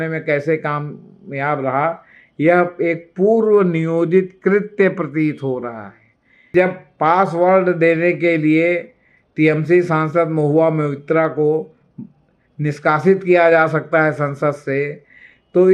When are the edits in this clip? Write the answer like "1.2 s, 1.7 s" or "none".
6.5 s